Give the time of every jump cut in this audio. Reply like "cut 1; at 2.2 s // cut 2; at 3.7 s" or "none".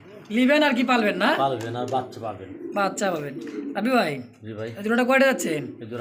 none